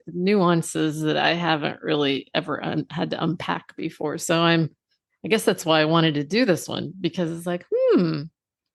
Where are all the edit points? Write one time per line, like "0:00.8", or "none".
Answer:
none